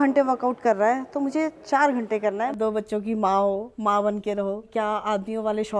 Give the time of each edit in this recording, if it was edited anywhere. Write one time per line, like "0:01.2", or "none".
0:02.5
0:04.7